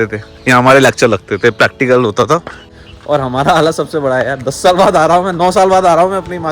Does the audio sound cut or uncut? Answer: cut